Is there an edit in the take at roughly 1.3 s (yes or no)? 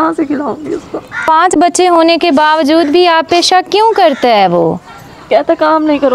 yes